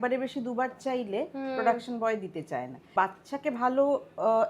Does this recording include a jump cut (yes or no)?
yes